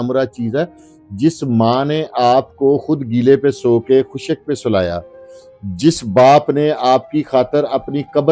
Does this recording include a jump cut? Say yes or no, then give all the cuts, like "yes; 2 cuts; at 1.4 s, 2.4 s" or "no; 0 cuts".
no; 0 cuts